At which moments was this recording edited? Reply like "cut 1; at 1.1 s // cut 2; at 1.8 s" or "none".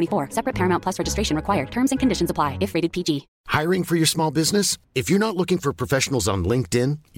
cut 1; at 3.3 s

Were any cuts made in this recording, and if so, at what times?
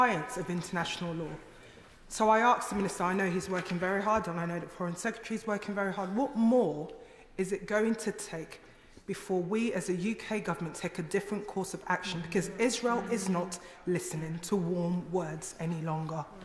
none

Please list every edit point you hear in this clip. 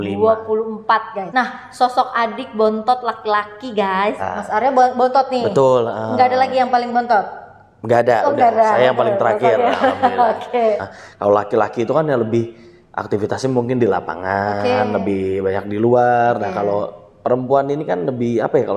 cut 1; at 1.2 s // cut 2; at 4.2 s // cut 3; at 10.8 s

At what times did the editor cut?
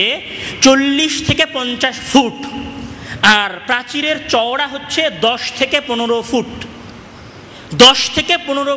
none

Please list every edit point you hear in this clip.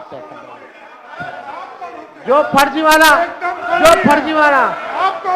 none

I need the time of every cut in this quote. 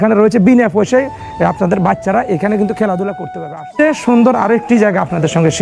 cut 1; at 3.8 s

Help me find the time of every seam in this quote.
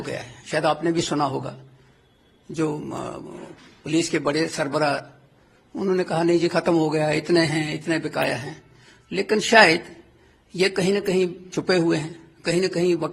none

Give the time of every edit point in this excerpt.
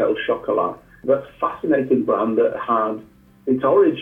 cut 1; at 0.9 s

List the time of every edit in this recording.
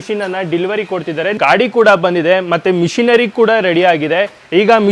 cut 1; at 1.4 s

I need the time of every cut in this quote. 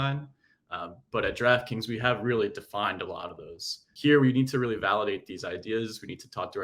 cut 1; at 3.8 s

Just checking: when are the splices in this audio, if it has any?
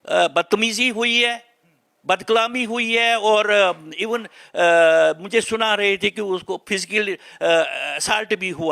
none

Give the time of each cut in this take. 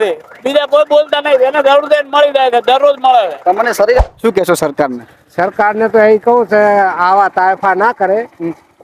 cut 1; at 4.0 s

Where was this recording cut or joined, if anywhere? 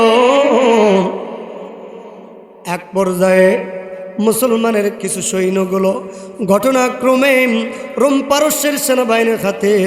cut 1; at 5.0 s

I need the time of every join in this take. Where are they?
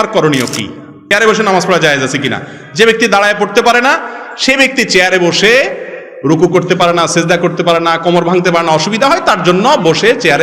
cut 1; at 1.1 s

